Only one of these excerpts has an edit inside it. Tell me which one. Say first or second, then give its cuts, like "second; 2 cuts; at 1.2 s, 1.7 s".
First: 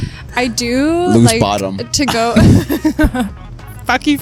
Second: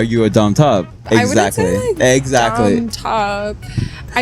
second; 1 cut; at 1.0 s